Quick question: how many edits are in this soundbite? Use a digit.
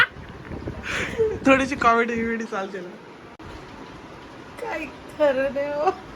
1